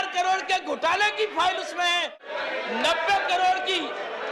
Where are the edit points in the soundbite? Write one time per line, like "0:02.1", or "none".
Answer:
0:02.1